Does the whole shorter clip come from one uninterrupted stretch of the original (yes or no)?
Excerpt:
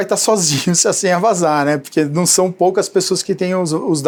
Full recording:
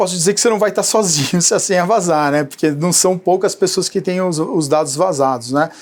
yes